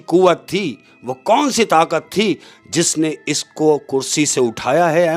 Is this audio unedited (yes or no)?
yes